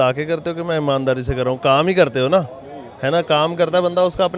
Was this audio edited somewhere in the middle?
no; 0 cuts

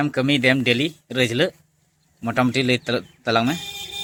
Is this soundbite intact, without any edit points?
yes; 0 cuts

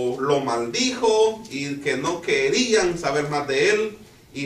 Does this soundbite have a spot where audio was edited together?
yes; 1 cut; at 3.5 s

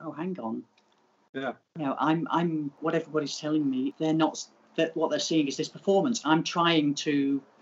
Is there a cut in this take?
yes; 2 cuts; at 2.7 s, 3.9 s

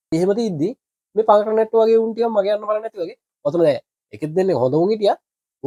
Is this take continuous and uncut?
yes; 0 cuts

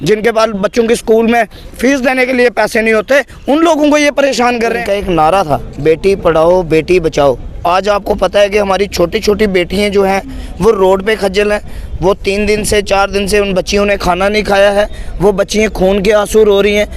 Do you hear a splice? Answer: yes; 1 cut; at 4.8 s

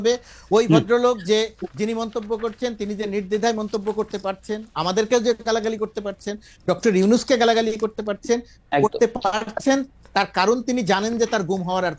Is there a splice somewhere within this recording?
no; 0 cuts

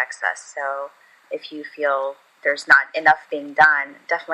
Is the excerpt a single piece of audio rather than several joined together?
no; 2 cuts; at 1.2 s, 2.3 s

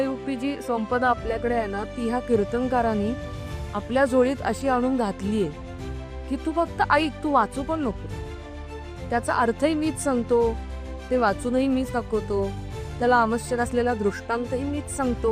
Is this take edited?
no; 0 cuts

